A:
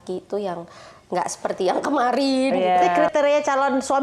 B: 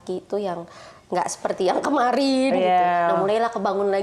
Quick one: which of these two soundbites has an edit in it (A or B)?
A